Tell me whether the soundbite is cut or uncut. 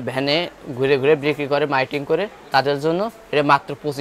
uncut